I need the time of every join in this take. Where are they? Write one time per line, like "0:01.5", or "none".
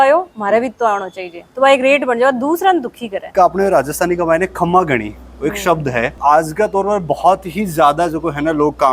0:03.2
0:06.2